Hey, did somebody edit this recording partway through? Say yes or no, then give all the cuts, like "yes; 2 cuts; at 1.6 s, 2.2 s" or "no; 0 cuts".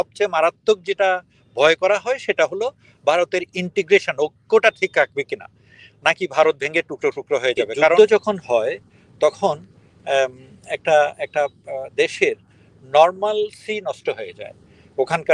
yes; 1 cut; at 8.0 s